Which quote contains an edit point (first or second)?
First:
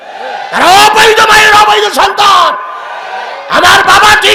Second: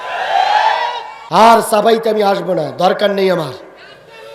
second